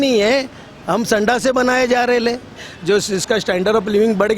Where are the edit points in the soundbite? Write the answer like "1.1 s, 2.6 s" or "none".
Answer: 2.7 s